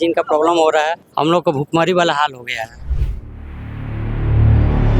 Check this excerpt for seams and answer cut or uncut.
cut